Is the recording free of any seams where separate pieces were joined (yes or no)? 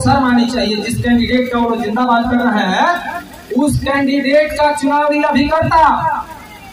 yes